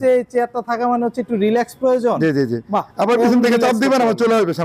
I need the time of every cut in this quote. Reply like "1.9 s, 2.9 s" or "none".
none